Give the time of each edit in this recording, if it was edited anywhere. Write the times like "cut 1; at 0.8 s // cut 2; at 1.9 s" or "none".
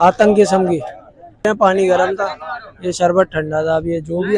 cut 1; at 1.5 s